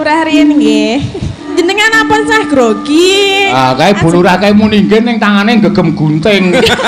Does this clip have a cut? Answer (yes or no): yes